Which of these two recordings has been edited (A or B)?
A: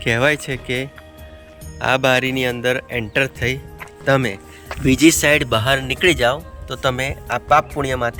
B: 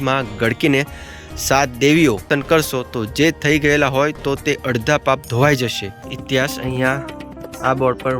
B